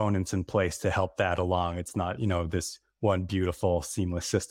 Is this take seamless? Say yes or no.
yes